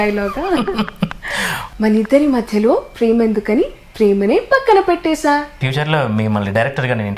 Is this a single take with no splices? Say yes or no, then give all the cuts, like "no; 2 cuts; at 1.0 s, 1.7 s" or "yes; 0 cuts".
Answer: no; 2 cuts; at 1.6 s, 5.5 s